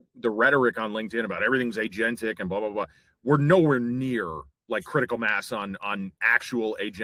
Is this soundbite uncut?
yes; 0 cuts

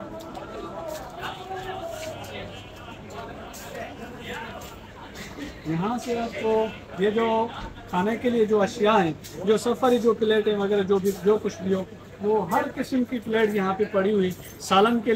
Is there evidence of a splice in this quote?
no; 0 cuts

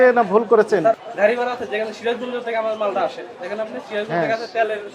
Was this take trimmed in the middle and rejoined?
yes; 1 cut; at 0.9 s

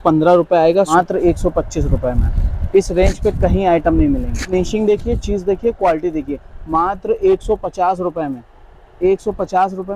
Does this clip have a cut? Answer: yes; 2 cuts; at 0.9 s, 4.4 s

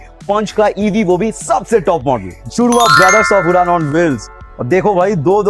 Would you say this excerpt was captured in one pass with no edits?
no; 1 cut; at 2.4 s

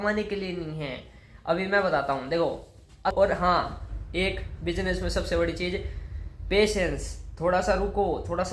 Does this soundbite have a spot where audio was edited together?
yes; 1 cut; at 3.1 s

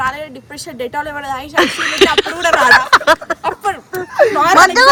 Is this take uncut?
yes; 0 cuts

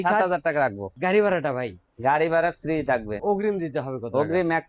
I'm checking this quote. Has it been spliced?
yes; 1 cut; at 0.9 s

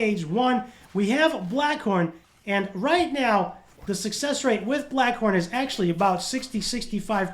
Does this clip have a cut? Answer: yes; 1 cut; at 2.2 s

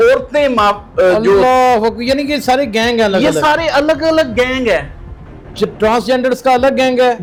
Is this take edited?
no; 0 cuts

